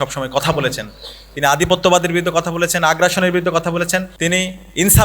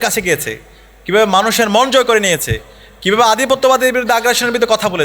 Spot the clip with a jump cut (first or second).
first